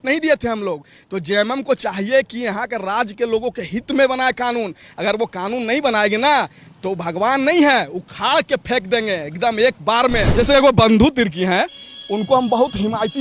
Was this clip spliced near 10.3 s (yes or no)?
yes